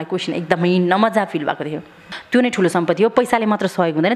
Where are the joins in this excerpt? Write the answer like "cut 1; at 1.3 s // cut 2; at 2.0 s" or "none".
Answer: cut 1; at 2.1 s